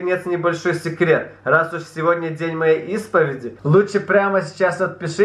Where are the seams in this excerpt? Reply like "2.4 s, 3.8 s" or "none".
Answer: 3.5 s